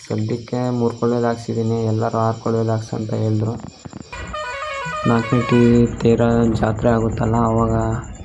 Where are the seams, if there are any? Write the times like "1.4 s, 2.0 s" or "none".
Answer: 4.2 s